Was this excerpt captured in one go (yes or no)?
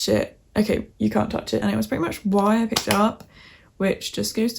no